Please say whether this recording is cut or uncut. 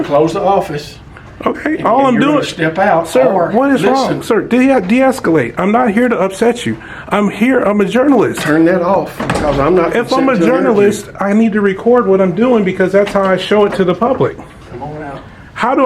uncut